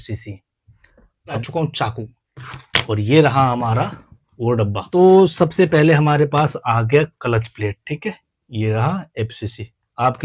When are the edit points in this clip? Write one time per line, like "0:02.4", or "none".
0:01.4
0:04.9